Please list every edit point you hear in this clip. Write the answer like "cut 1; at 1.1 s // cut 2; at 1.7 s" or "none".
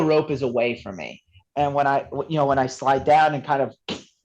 cut 1; at 1.4 s

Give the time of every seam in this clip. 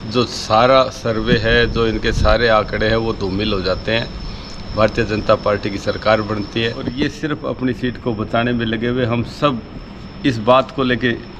cut 1; at 6.8 s

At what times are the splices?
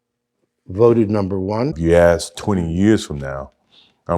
cut 1; at 1.7 s

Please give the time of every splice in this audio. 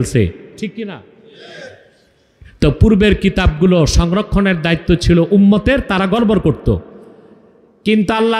none

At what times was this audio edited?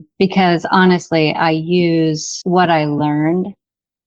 cut 1; at 2.3 s

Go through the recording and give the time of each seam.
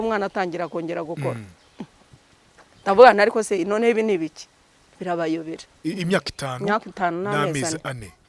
cut 1; at 5.7 s

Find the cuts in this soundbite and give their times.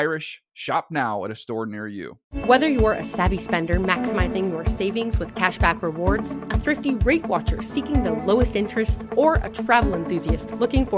cut 1; at 2.2 s

